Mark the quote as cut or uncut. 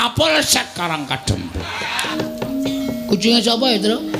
cut